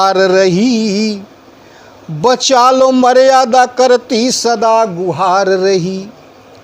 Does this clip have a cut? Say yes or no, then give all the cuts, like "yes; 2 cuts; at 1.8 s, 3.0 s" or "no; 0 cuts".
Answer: no; 0 cuts